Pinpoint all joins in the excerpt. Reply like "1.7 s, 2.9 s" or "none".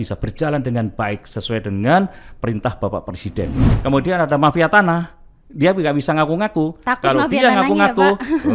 3.7 s